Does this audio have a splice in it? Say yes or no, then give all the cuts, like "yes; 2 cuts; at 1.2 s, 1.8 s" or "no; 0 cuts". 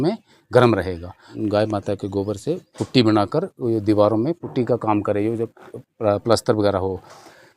yes; 1 cut; at 1.3 s